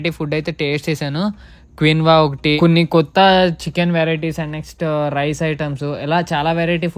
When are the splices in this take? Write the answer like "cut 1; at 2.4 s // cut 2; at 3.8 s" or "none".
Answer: none